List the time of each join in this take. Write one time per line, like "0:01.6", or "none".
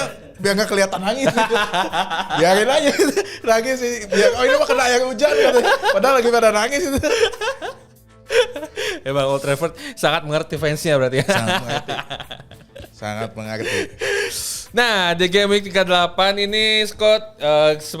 none